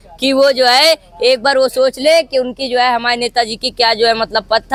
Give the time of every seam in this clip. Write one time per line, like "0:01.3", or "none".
none